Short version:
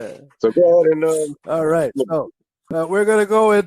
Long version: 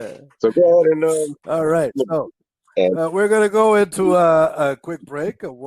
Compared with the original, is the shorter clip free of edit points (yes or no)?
no